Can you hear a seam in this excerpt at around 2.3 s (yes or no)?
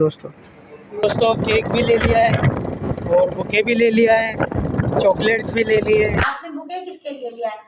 no